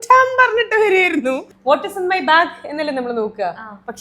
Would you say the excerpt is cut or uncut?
cut